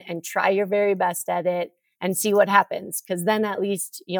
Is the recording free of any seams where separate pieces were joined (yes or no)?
yes